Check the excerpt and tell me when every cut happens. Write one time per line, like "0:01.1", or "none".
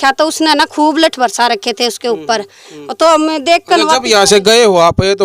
none

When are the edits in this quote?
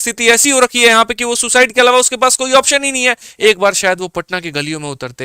0:03.3

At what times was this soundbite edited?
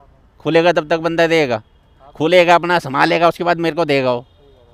none

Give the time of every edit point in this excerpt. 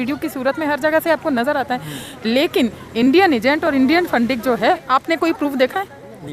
0:04.8

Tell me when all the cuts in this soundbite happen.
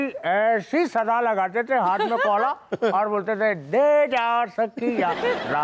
none

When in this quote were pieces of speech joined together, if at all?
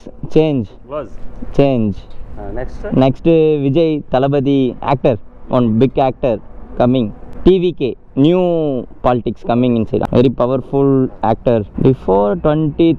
0:07.2
0:10.0
0:11.7

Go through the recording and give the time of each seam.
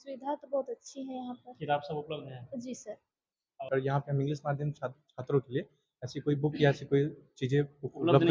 0:03.7

